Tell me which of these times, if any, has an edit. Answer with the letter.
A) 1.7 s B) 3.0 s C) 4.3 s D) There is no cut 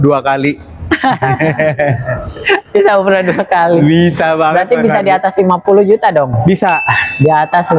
D